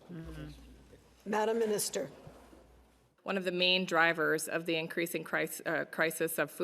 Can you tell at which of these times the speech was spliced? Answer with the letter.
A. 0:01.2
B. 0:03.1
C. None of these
B